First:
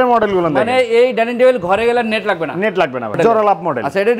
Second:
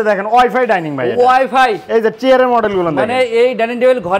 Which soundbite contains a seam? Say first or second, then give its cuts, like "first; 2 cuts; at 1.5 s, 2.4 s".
first; 1 cut; at 3.1 s